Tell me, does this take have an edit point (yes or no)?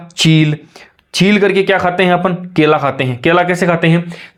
no